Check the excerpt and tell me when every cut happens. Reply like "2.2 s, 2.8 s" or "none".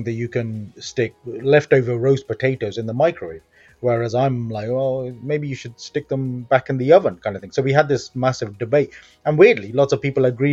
1.0 s